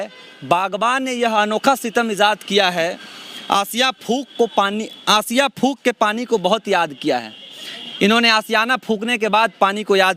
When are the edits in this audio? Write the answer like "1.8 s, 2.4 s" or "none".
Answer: none